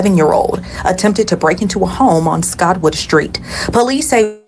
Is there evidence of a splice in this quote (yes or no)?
no